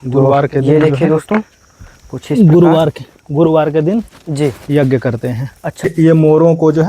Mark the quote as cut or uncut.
cut